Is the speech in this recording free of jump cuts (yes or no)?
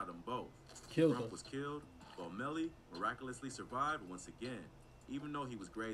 yes